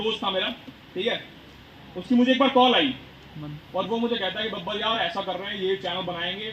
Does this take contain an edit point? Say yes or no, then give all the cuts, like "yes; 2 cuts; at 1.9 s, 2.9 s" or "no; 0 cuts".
no; 0 cuts